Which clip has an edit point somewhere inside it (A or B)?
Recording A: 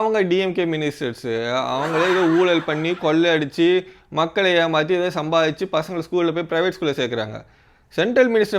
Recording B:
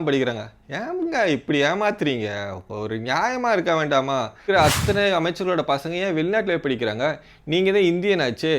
B